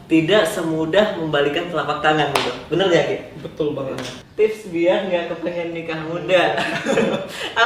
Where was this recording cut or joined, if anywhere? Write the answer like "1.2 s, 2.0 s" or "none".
4.2 s